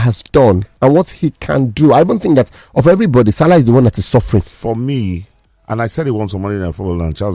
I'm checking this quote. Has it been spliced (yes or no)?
no